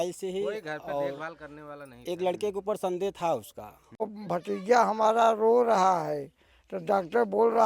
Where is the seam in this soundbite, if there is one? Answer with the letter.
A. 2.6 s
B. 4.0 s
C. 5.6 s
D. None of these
B